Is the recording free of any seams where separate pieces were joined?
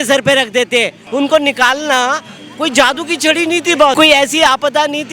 no; 2 cuts; at 1.0 s, 3.9 s

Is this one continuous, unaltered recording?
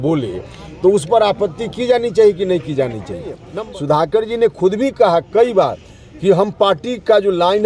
no; 1 cut; at 3.4 s

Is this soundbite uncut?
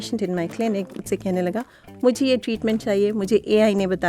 no; 1 cut; at 1.0 s

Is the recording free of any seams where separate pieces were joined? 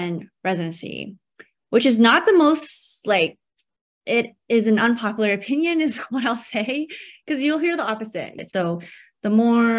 no; 1 cut; at 8.3 s

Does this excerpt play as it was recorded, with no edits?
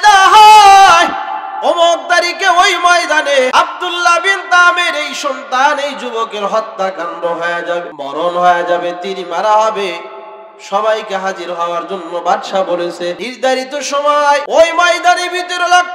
no; 4 cuts; at 3.5 s, 7.9 s, 13.3 s, 14.4 s

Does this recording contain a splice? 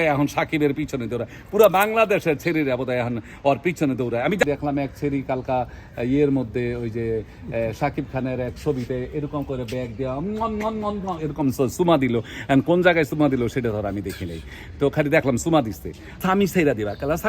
yes; 2 cuts; at 4.4 s, 16.1 s

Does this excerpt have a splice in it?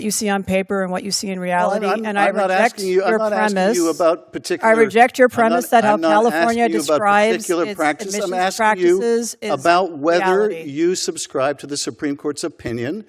no; 0 cuts

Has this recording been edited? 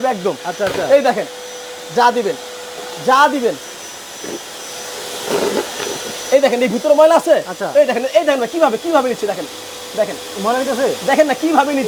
no; 0 cuts

